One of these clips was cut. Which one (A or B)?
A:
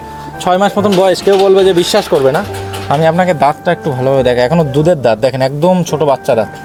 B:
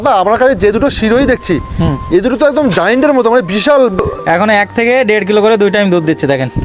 B